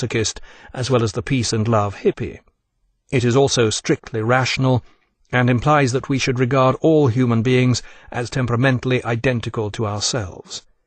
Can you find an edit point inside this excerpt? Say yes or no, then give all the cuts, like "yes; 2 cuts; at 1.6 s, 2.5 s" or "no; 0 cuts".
yes; 1 cut; at 6.9 s